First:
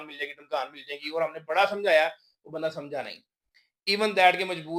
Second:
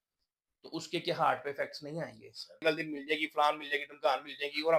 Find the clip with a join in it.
second; 1 cut; at 2.6 s

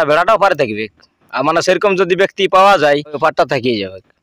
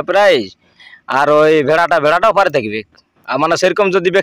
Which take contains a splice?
first; 1 cut; at 3.2 s

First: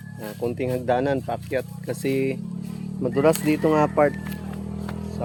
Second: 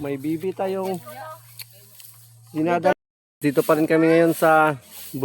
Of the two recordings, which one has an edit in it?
second; 1 cut; at 2.9 s

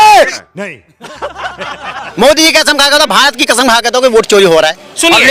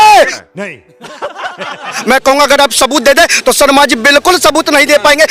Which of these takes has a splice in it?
second; 1 cut; at 2.0 s

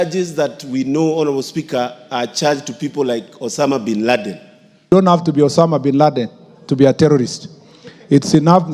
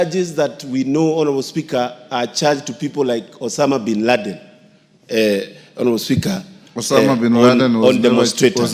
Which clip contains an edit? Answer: first; 1 cut; at 4.9 s

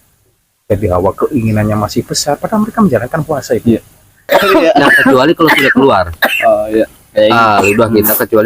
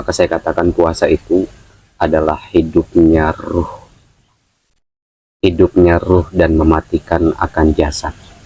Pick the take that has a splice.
first; 1 cut; at 4.3 s

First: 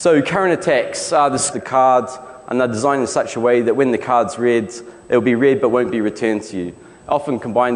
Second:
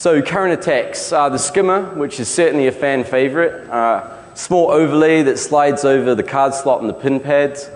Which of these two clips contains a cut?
second; 1 cut; at 1.5 s

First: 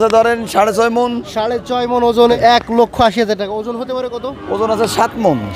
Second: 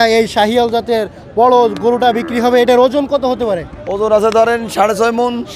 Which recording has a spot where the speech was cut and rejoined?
first; 1 cut; at 2.3 s

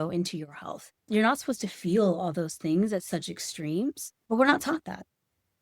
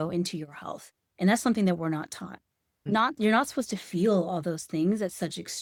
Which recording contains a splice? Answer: first; 1 cut; at 1.0 s

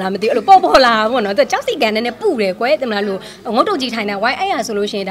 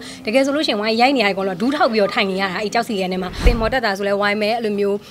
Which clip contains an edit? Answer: second; 1 cut; at 3.4 s

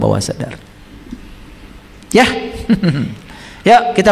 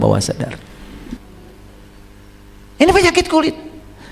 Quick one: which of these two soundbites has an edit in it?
second; 1 cut; at 1.3 s

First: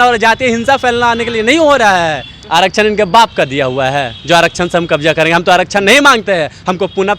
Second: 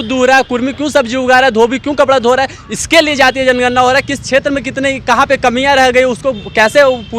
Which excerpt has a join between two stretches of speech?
first; 1 cut; at 2.3 s

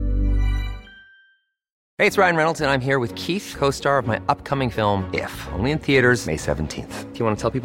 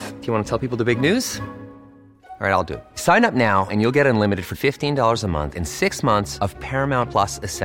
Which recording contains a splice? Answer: first; 1 cut; at 1.8 s

